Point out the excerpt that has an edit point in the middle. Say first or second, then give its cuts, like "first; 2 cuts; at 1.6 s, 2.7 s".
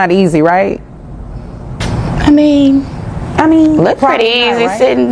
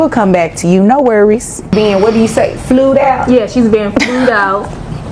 second; 1 cut; at 1.7 s